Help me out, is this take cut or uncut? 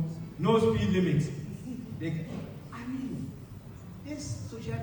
uncut